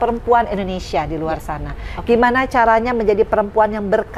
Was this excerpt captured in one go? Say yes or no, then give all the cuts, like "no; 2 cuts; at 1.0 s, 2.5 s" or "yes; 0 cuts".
yes; 0 cuts